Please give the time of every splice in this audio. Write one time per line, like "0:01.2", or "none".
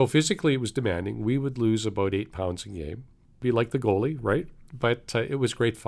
0:03.4